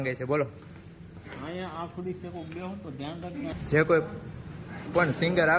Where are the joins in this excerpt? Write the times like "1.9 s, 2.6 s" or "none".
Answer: 3.5 s